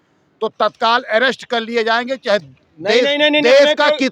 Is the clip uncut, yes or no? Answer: yes